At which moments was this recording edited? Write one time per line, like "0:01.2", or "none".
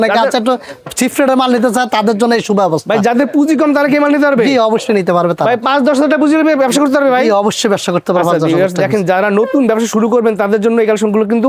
none

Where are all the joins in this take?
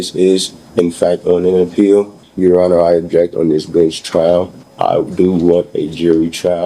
0:02.2
0:04.6

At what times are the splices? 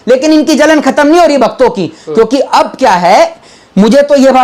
none

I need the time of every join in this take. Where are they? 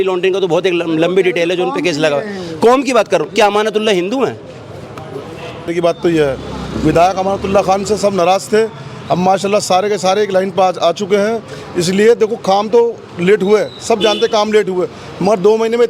0:05.7

